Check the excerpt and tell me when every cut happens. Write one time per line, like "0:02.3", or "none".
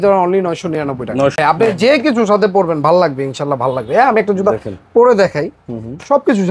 0:01.3